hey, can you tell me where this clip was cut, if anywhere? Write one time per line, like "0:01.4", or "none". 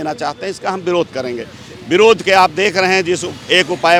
none